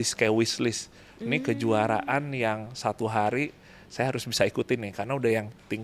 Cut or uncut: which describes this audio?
uncut